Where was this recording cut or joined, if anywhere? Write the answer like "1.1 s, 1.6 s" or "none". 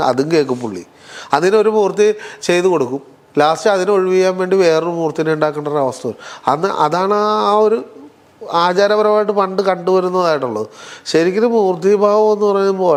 none